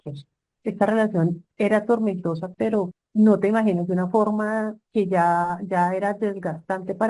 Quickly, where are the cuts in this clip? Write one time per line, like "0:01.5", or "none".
0:03.0